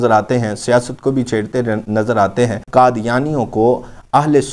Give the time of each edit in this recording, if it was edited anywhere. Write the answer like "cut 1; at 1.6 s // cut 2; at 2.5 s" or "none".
cut 1; at 2.6 s